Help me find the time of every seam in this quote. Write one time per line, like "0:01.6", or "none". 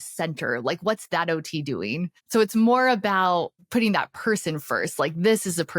0:02.2
0:03.6